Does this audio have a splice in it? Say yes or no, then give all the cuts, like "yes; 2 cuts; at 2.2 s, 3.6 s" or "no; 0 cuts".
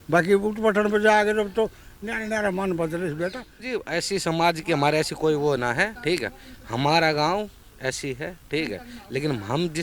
yes; 1 cut; at 3.6 s